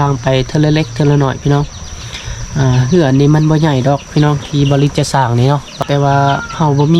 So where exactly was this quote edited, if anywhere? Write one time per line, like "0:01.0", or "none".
0:05.8